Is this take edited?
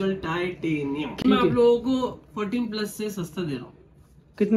yes; 1 cut; at 1.2 s

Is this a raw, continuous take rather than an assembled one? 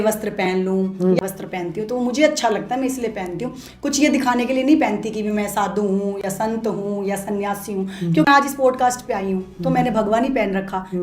no; 2 cuts; at 1.2 s, 8.3 s

